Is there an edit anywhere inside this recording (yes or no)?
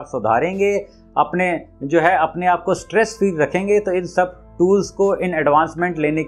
no